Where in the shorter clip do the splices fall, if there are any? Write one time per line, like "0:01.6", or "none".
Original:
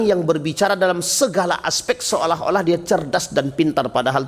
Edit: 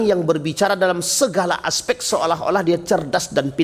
none